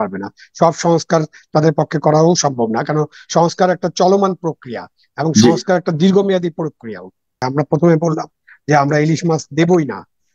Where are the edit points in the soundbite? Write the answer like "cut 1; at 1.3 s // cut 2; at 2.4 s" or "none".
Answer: cut 1; at 7.4 s